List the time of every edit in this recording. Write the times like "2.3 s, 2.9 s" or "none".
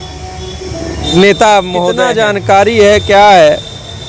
2.0 s

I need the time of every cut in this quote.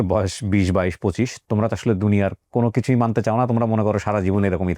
none

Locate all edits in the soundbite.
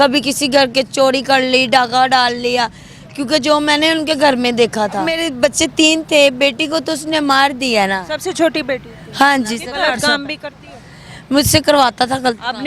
5.1 s, 9.7 s

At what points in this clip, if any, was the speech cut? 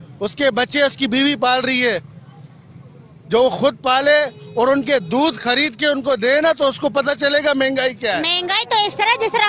8.3 s

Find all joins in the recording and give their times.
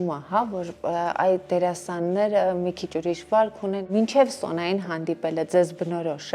3.9 s

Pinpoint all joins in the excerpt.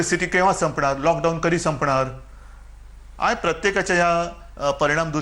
none

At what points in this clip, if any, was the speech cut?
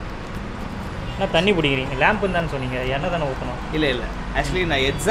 none

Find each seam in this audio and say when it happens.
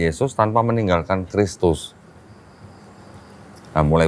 none

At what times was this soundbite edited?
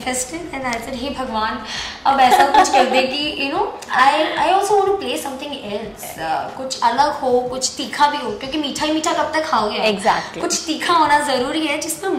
none

